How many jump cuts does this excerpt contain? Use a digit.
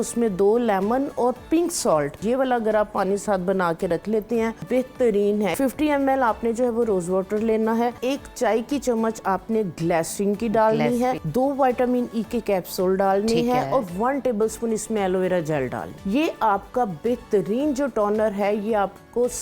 6